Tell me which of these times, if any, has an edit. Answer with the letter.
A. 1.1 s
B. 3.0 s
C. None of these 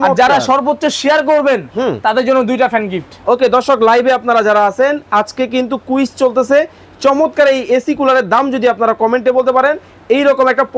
C